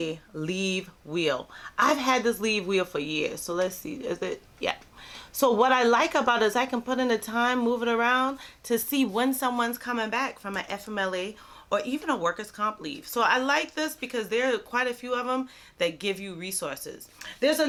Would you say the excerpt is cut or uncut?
uncut